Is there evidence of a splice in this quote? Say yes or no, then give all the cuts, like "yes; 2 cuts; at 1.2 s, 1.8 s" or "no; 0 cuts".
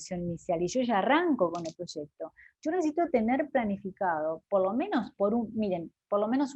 no; 0 cuts